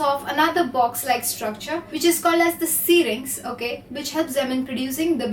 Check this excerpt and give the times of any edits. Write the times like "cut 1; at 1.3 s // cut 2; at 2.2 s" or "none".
cut 1; at 3.9 s